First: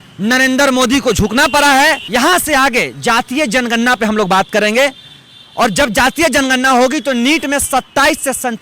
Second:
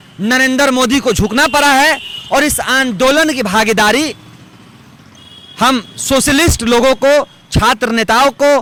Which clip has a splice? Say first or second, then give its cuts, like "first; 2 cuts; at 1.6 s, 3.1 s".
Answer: first; 1 cut; at 2.0 s